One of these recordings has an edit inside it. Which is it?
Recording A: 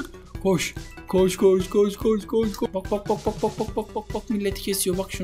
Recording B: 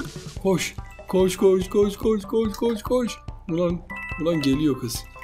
A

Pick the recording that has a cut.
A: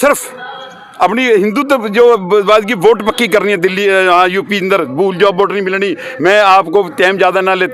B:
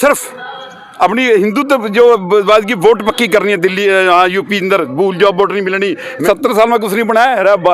B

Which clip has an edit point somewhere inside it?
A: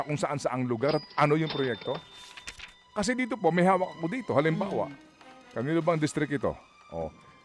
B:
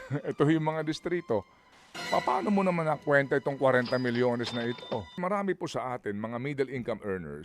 B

